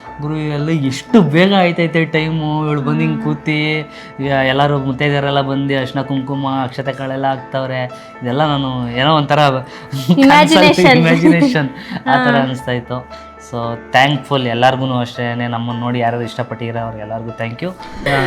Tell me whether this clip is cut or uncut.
uncut